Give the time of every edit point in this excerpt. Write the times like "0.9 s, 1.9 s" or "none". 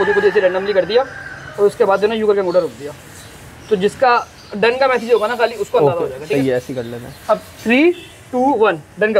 none